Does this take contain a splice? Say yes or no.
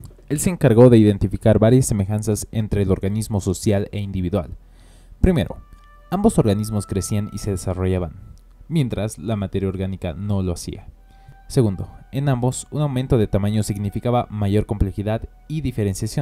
no